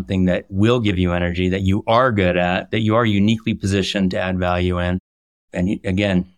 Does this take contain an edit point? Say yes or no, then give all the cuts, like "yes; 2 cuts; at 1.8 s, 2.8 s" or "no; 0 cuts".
yes; 1 cut; at 5.4 s